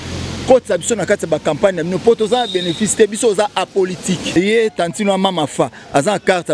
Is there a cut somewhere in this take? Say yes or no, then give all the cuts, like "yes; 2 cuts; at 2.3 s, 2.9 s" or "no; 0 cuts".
yes; 1 cut; at 4.2 s